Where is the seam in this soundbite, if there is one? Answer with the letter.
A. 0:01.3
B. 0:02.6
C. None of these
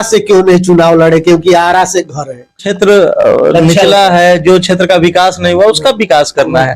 B